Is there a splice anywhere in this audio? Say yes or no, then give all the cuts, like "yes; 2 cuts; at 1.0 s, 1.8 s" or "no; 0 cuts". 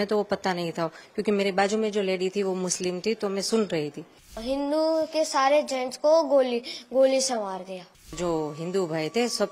yes; 2 cuts; at 4.4 s, 8.1 s